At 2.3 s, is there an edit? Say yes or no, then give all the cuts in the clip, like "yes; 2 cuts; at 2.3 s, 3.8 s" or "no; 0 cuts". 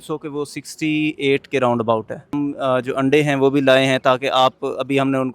yes; 1 cut; at 2.3 s